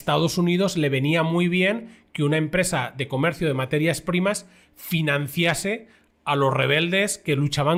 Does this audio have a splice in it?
no; 0 cuts

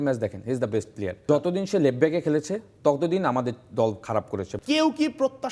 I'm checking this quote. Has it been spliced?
yes; 2 cuts; at 1.2 s, 4.6 s

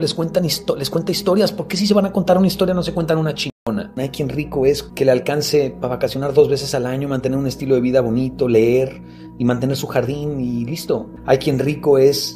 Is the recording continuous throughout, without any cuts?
no; 3 cuts; at 4.0 s, 4.9 s, 11.1 s

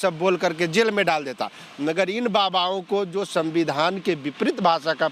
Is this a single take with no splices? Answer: yes; 0 cuts

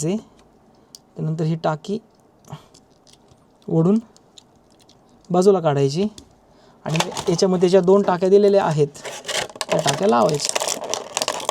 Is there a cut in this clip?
no; 0 cuts

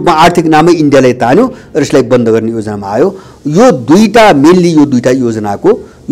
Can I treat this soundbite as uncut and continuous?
yes; 0 cuts

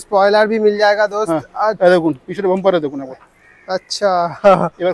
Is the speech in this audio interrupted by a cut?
no; 0 cuts

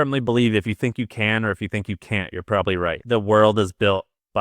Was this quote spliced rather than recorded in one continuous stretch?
yes; 1 cut; at 3.0 s

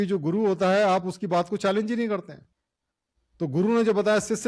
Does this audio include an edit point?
no; 0 cuts

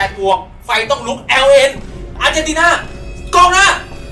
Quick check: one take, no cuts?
yes; 0 cuts

